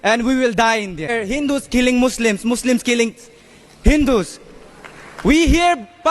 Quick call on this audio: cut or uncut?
cut